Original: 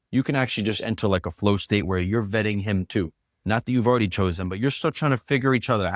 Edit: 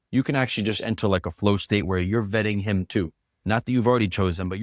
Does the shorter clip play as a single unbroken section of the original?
yes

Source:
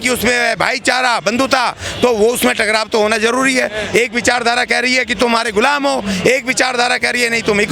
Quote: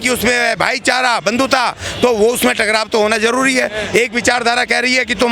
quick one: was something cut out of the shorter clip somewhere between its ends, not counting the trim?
no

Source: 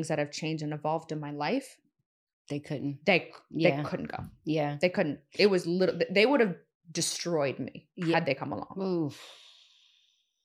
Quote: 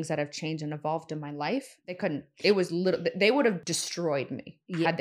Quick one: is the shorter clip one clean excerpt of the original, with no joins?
no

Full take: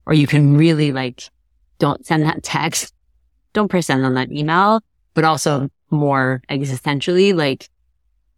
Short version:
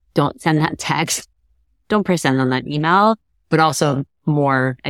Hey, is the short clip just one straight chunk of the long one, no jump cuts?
yes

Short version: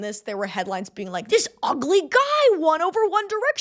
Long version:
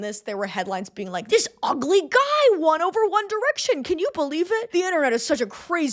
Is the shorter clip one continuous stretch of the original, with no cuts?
yes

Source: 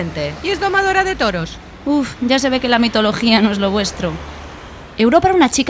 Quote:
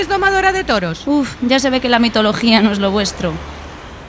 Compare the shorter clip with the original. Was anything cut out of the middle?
yes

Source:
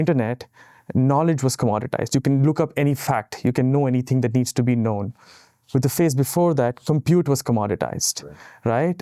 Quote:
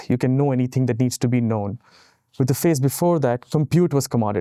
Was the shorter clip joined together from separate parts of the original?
no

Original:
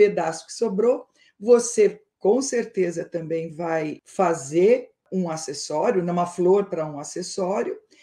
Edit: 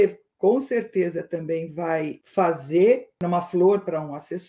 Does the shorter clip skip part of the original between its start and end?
yes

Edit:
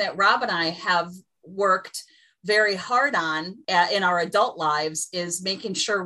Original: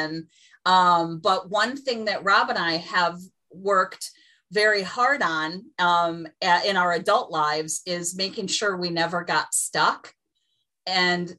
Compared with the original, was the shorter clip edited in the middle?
yes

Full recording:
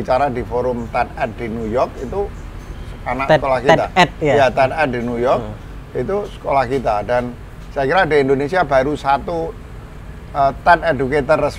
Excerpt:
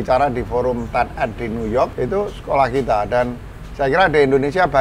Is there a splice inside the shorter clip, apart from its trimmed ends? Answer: yes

